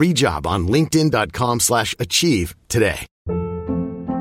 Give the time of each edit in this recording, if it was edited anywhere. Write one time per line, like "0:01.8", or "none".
0:03.1